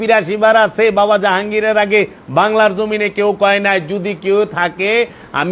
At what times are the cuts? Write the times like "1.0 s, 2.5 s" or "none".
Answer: none